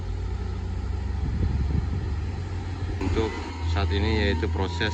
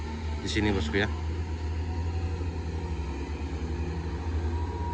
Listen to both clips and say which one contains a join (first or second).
first